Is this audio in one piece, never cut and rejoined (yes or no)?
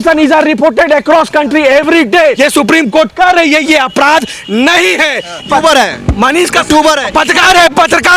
no